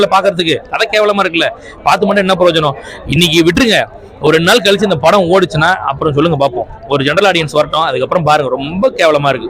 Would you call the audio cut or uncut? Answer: uncut